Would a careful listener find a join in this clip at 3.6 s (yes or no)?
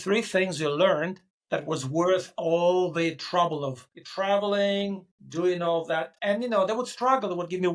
no